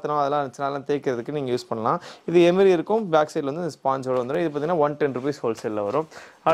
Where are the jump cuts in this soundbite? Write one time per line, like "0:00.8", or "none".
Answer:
none